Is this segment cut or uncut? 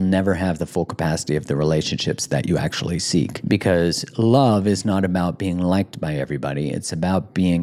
cut